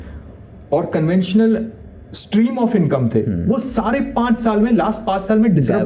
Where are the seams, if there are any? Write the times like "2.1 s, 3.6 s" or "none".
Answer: none